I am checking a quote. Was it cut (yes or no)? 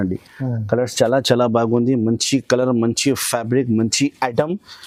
no